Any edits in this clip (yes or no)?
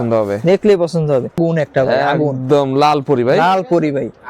yes